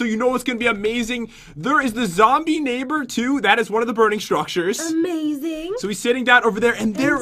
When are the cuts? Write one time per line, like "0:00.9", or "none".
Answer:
0:03.3